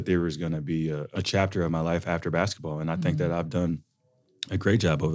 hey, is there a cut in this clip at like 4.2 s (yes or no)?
no